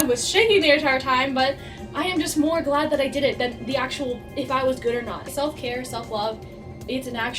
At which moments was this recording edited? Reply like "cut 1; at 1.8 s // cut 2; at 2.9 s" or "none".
cut 1; at 5.2 s